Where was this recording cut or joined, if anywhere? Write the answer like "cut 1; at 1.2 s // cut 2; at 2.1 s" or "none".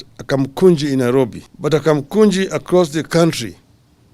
cut 1; at 1.5 s